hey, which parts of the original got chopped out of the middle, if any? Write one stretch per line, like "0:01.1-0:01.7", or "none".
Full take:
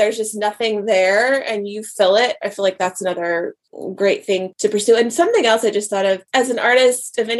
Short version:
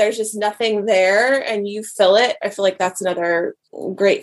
none